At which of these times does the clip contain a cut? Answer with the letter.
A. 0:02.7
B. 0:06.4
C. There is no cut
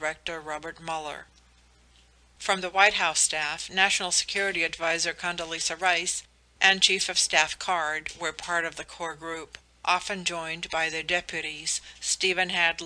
A